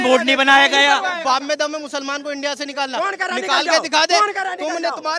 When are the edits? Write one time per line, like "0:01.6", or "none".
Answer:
0:01.2